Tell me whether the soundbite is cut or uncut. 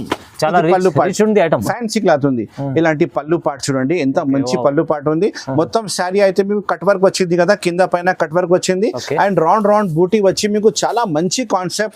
cut